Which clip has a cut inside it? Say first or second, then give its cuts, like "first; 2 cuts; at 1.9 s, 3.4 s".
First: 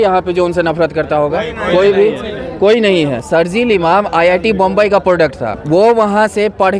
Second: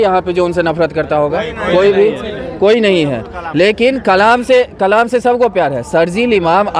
first; 2 cuts; at 3.2 s, 5.5 s